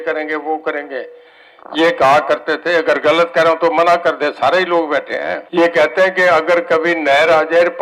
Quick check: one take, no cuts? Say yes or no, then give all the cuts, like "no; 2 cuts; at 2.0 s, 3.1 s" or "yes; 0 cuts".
no; 1 cut; at 5.4 s